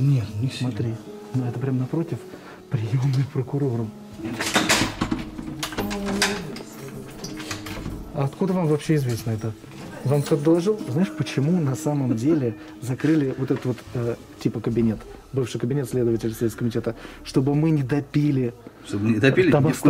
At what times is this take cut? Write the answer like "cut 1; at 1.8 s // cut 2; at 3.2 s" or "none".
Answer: cut 1; at 4.3 s // cut 2; at 10.9 s